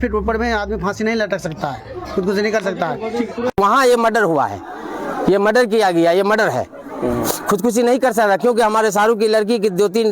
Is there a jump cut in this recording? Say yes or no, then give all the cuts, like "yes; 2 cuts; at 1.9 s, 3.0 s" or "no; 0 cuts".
yes; 1 cut; at 3.6 s